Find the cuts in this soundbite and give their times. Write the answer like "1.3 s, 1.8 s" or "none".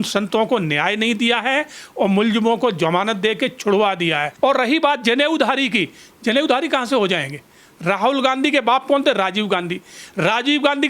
4.3 s